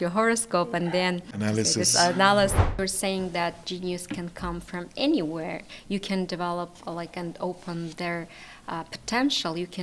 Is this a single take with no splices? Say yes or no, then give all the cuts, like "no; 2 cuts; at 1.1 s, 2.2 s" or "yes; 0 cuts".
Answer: no; 2 cuts; at 1.3 s, 2.8 s